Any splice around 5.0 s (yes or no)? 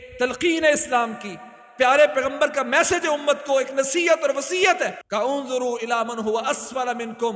yes